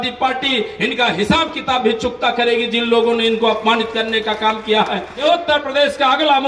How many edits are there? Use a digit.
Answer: 1